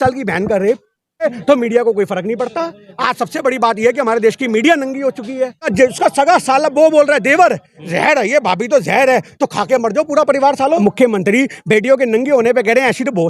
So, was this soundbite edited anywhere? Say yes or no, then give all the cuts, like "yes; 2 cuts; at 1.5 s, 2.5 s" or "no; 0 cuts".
yes; 3 cuts; at 1.2 s, 5.7 s, 10.8 s